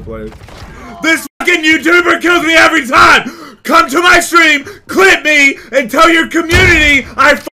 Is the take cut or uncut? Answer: uncut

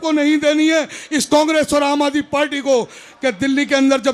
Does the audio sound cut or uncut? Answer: cut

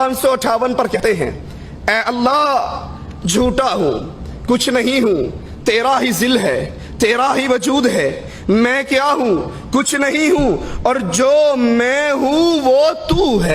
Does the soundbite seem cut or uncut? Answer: cut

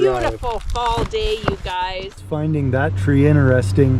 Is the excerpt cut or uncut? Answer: cut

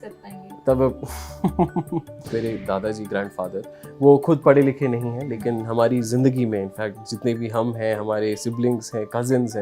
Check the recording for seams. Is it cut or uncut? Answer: cut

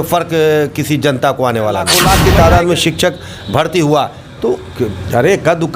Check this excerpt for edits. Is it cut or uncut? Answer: cut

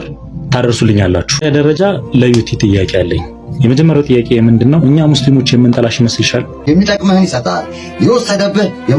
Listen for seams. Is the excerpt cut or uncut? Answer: cut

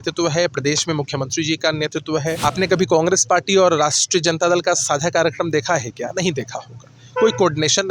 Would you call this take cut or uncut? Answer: cut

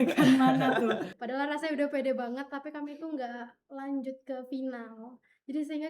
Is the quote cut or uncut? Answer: cut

